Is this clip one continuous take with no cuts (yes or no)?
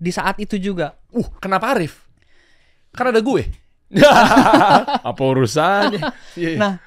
yes